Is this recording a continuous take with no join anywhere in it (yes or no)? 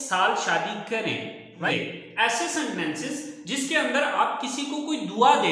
no